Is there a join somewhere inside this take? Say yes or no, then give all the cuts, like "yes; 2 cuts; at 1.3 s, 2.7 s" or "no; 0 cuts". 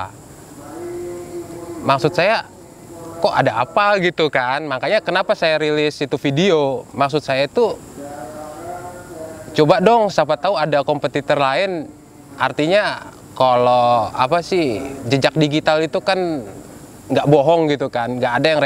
no; 0 cuts